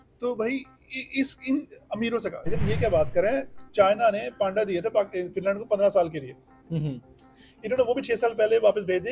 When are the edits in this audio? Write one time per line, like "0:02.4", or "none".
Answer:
0:02.5

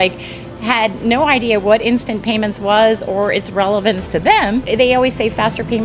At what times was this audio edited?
0:04.6

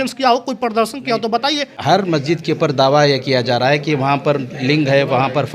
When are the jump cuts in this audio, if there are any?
0:01.8

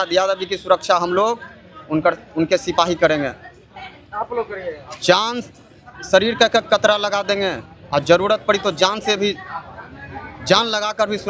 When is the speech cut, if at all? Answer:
none

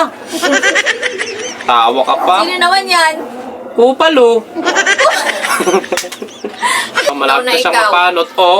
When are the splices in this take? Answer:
0:07.1

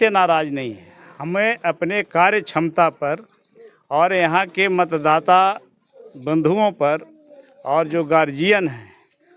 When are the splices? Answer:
none

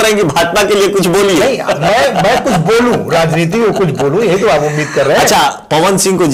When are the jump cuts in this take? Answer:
none

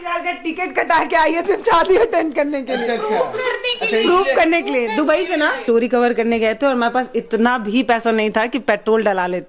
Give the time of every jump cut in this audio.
0:05.6

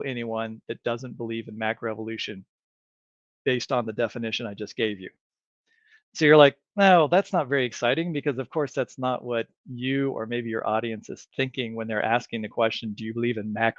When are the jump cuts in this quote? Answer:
none

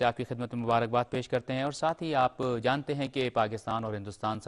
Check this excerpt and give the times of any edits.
0:02.1

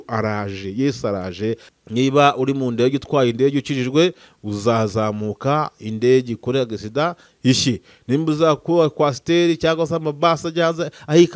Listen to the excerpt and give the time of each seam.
0:01.7

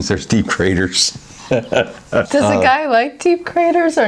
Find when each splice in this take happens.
0:02.3

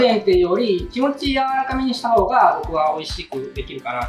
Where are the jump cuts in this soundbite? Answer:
none

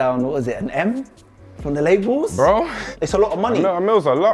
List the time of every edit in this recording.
0:02.8

